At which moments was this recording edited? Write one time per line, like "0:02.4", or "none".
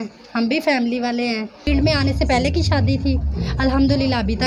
0:01.7